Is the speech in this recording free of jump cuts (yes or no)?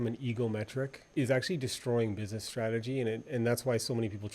no